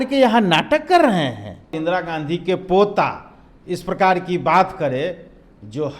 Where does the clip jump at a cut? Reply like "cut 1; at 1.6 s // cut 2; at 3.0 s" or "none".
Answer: cut 1; at 1.8 s